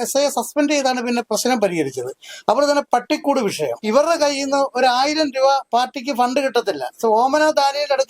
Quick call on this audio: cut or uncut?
cut